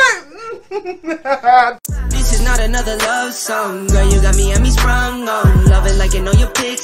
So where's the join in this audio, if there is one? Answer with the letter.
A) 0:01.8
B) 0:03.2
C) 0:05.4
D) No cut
A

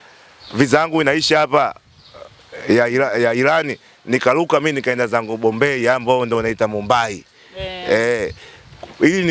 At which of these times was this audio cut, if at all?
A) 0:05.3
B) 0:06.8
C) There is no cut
C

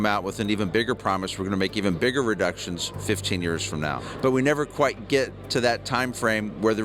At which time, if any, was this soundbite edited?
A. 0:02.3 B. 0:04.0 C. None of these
B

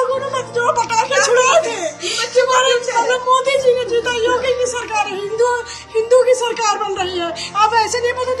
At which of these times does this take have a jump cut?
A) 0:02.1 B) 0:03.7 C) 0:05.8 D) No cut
D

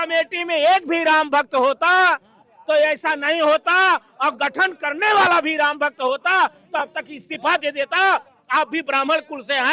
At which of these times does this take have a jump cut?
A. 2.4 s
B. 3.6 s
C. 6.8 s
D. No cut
D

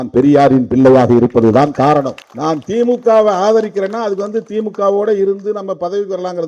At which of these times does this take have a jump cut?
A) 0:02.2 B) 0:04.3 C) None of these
A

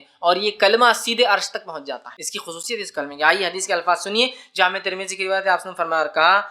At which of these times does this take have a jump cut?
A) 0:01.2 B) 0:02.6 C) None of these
B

